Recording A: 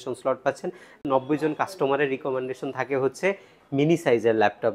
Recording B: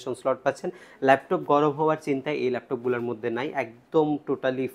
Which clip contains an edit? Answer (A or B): A